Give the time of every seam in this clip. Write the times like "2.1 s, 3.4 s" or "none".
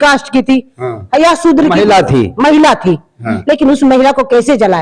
none